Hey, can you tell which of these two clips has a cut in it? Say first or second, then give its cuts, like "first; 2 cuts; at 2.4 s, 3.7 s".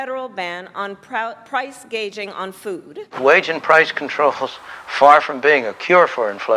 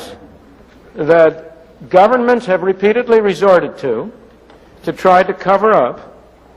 first; 1 cut; at 3.0 s